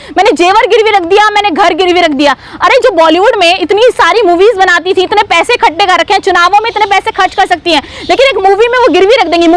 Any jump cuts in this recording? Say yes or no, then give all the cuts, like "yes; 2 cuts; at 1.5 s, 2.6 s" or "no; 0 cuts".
no; 0 cuts